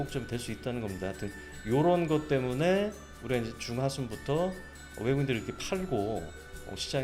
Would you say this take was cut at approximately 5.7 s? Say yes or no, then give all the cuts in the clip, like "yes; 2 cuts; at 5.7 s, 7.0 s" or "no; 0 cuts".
no; 0 cuts